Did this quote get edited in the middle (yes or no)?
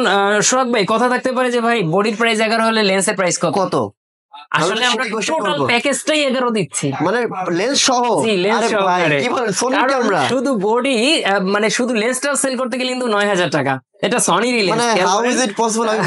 no